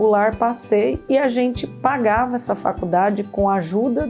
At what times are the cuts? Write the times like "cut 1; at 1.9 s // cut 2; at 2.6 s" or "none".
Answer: none